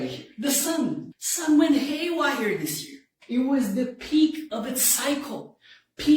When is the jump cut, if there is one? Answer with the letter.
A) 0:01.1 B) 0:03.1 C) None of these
A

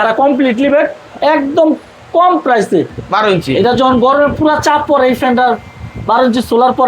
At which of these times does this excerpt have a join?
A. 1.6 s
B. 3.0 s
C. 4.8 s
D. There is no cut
B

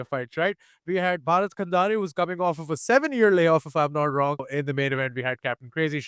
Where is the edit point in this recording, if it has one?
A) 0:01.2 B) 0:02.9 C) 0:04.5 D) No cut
C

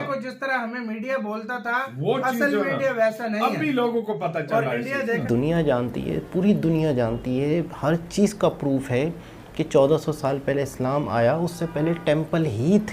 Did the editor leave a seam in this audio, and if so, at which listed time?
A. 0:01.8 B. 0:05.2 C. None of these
B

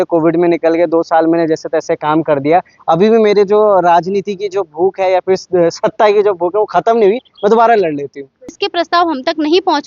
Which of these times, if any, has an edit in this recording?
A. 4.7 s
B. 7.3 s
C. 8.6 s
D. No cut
C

